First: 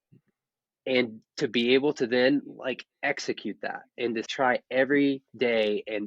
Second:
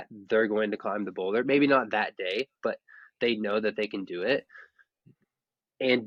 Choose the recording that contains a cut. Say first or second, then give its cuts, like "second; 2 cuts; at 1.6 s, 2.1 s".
first; 1 cut; at 4.3 s